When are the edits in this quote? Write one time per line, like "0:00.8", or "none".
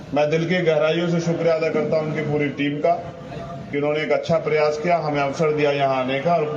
0:02.4
0:04.3

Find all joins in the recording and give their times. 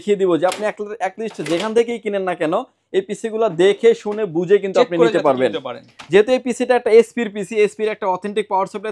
none

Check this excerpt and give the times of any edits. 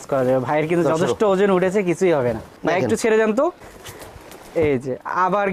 0:02.6

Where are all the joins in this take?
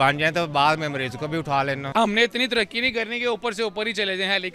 0:01.9

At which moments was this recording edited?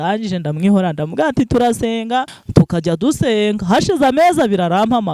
0:02.4

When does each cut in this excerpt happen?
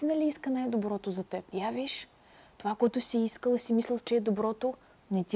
0:01.5

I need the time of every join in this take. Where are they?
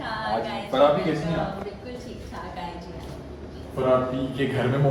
none

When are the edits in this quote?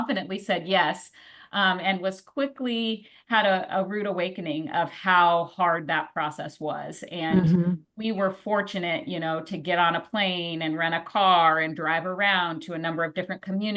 none

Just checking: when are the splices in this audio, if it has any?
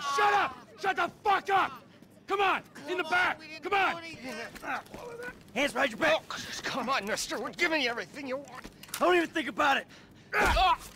0:04.2

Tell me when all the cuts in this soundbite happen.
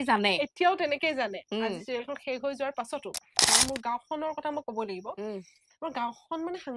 0:03.4

